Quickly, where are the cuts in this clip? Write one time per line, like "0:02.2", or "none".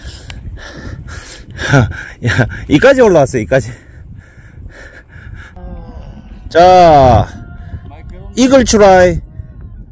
0:05.6